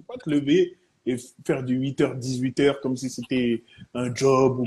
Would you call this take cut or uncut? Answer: uncut